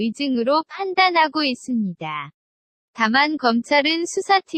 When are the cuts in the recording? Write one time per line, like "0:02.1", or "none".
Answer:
none